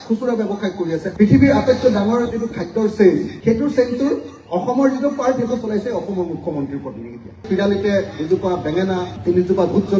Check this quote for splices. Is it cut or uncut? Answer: cut